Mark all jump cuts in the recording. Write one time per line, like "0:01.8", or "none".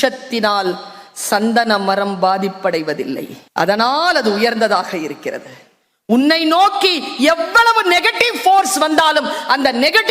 0:03.4